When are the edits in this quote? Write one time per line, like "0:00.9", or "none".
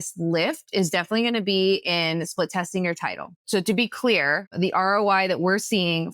0:03.3
0:04.5